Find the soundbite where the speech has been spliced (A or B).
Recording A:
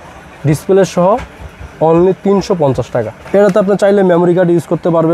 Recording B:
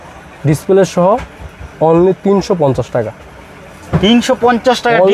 A